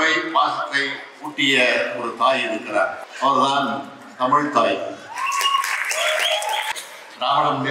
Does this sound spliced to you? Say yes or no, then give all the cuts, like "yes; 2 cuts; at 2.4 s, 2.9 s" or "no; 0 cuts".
yes; 2 cuts; at 3.0 s, 6.7 s